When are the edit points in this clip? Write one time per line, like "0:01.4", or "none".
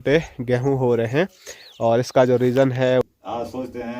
0:03.0